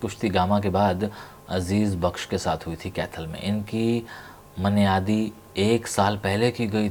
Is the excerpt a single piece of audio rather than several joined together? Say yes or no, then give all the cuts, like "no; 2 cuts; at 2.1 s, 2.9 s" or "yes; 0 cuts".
yes; 0 cuts